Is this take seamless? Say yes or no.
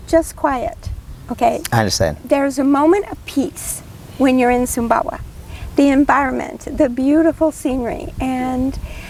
yes